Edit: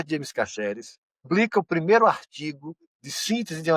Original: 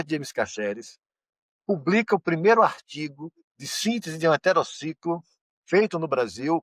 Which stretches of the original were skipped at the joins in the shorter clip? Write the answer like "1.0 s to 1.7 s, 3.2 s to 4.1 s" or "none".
1.2 s to 1.8 s

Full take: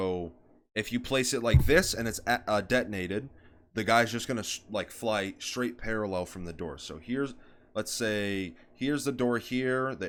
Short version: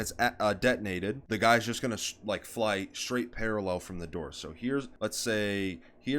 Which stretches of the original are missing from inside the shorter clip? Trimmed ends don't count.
3.3 s to 3.7 s, 7.4 s to 7.7 s

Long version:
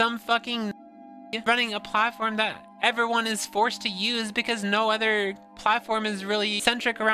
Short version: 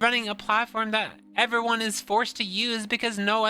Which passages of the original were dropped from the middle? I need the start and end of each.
none

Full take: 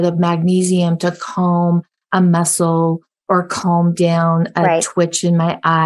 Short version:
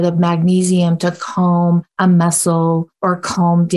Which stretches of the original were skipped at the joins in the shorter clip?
1.9 s to 2.0 s, 3.0 s to 3.2 s

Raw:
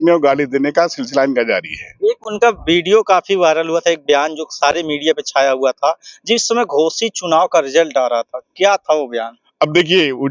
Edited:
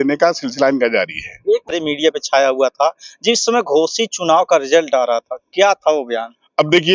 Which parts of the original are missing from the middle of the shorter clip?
2.3 s to 4.8 s

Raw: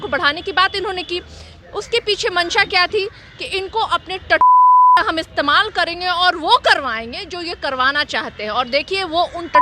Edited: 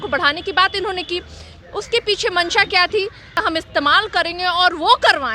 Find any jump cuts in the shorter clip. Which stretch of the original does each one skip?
3.5 s to 5.1 s

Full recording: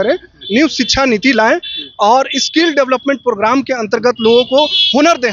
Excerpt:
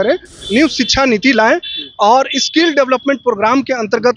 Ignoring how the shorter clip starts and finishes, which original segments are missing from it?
none

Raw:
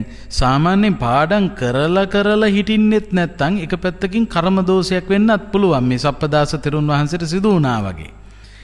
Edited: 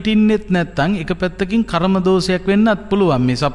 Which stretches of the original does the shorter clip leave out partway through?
none

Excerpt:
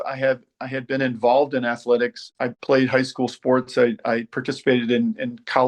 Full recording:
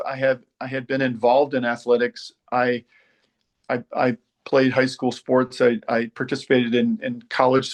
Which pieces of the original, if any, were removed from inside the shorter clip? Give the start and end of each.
2.4 s to 4.2 s

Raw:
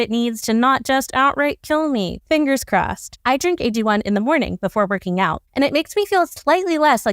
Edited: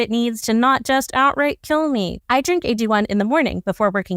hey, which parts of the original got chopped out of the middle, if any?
2.2 s to 3.1 s

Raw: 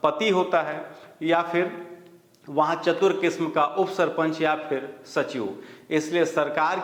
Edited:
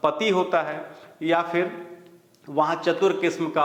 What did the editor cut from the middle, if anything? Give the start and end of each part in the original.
none

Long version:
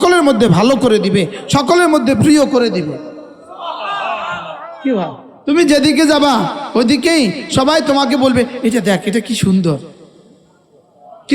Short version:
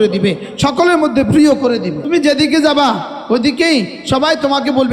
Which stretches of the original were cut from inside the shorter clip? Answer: 2.9 s to 5.5 s

